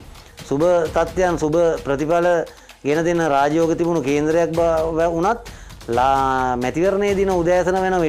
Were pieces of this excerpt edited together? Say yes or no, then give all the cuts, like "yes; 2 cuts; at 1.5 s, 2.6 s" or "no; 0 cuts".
no; 0 cuts